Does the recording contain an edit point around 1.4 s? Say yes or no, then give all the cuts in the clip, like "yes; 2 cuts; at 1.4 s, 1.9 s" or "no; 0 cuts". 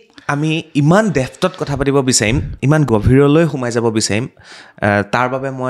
no; 1 cut; at 2.9 s